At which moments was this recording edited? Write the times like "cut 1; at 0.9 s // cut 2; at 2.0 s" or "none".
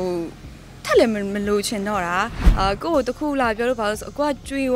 cut 1; at 2.4 s